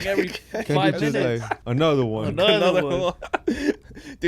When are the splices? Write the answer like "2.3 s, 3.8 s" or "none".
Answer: 1.5 s